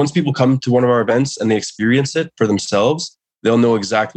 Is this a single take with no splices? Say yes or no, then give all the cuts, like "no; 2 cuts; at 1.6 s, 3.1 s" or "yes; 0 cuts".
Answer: yes; 0 cuts